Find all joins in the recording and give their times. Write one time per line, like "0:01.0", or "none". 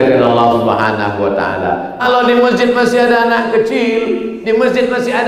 0:02.0